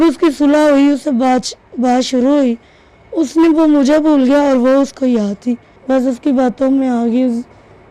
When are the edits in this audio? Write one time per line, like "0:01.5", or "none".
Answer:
0:05.7

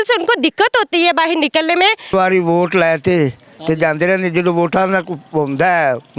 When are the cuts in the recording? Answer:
0:02.1

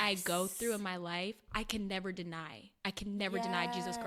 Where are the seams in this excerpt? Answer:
none

